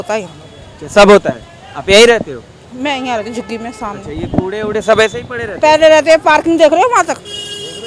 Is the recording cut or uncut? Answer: uncut